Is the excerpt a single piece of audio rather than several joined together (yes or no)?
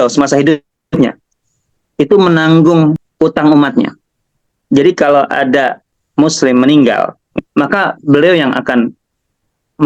no